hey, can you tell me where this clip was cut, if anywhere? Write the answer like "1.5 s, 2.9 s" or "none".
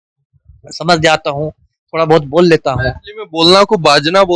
none